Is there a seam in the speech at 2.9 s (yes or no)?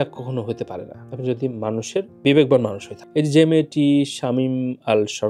yes